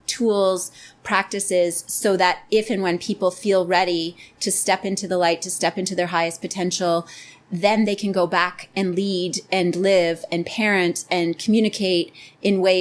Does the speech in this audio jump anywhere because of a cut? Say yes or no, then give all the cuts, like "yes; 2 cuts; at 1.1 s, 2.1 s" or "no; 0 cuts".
no; 0 cuts